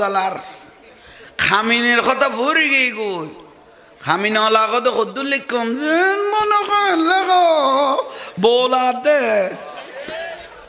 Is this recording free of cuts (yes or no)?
yes